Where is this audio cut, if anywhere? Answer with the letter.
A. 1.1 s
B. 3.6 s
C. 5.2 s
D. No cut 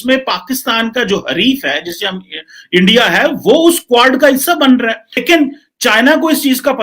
C